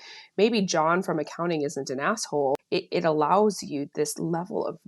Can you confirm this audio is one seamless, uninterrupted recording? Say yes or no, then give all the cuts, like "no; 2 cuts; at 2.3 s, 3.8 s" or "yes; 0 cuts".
no; 1 cut; at 2.6 s